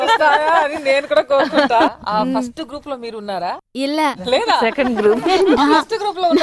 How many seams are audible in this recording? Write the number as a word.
one